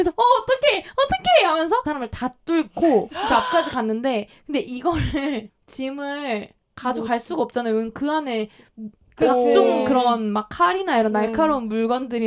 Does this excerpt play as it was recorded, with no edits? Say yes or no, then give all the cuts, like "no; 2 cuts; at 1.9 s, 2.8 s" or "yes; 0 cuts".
no; 1 cut; at 1.9 s